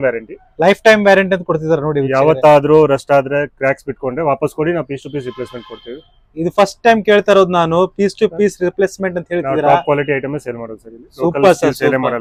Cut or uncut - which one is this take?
uncut